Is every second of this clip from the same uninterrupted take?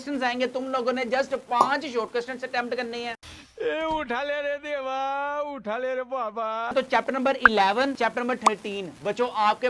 no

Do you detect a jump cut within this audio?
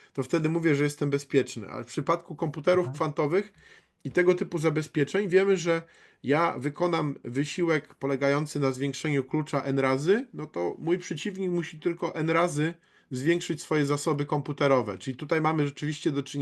no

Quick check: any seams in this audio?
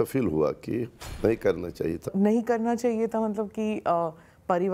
yes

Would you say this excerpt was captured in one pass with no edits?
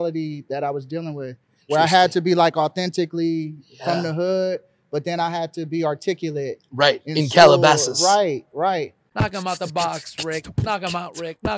no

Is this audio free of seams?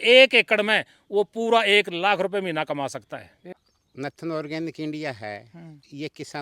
no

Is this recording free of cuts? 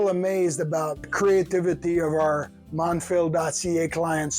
no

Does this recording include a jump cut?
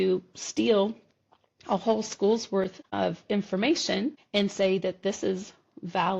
yes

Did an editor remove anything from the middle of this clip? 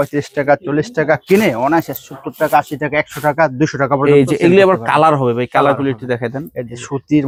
no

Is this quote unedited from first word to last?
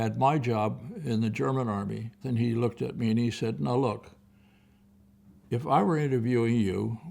no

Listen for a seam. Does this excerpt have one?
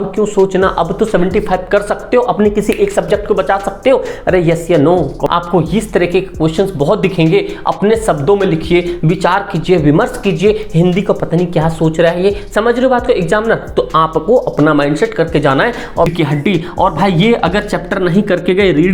yes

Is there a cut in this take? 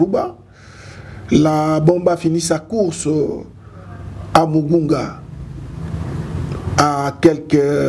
no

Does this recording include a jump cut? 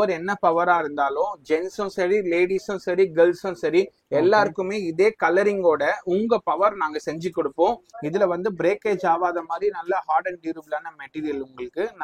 yes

